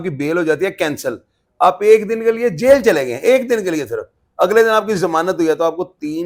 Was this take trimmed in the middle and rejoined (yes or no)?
no